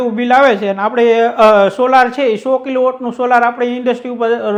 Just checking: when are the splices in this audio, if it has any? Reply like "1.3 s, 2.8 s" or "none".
none